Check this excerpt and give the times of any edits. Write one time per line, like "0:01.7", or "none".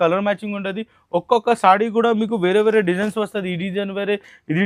none